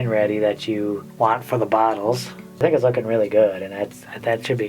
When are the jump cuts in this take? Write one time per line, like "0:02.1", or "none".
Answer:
0:01.0
0:02.6